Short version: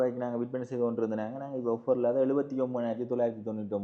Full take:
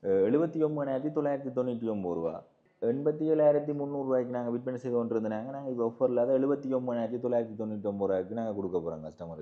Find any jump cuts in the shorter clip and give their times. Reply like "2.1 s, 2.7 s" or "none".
none